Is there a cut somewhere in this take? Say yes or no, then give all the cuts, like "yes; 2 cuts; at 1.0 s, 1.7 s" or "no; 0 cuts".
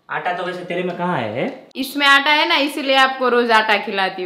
yes; 1 cut; at 1.7 s